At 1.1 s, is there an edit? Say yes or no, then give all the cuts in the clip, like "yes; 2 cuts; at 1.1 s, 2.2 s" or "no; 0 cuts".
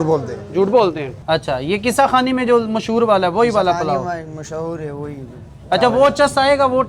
yes; 1 cut; at 1.1 s